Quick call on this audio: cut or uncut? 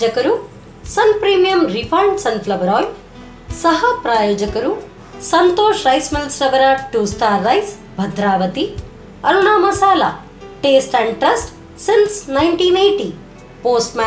uncut